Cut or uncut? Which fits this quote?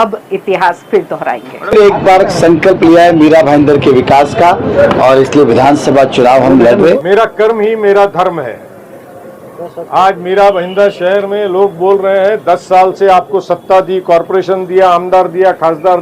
cut